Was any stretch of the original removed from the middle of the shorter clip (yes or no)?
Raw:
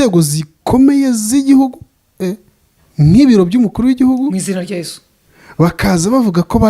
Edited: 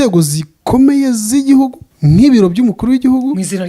yes